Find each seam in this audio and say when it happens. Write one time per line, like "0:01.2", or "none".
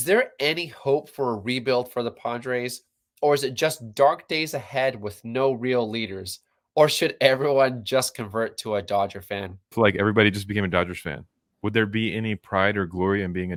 none